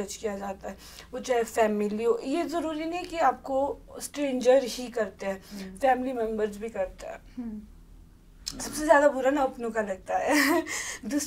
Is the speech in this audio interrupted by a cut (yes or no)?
no